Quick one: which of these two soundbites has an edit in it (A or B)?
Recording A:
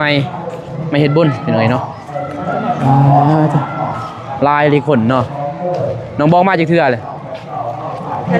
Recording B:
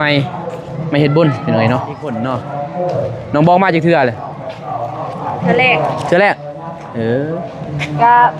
B